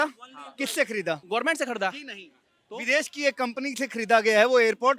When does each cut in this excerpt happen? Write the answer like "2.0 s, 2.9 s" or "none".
none